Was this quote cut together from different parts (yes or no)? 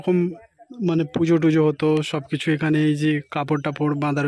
no